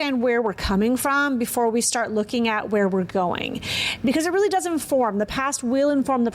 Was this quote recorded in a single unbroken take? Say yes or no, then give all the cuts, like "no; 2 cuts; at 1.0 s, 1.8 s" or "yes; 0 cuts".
yes; 0 cuts